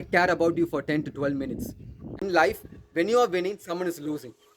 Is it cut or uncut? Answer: cut